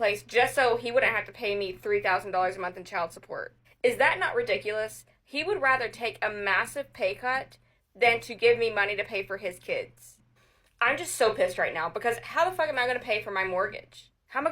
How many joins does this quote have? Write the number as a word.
two